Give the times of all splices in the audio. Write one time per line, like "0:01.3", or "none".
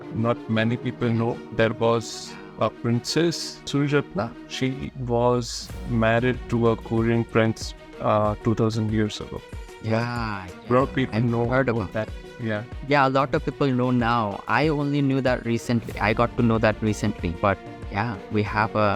none